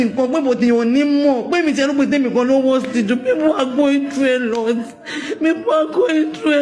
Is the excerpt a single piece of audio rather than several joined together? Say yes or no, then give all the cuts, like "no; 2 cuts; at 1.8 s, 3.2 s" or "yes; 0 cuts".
yes; 0 cuts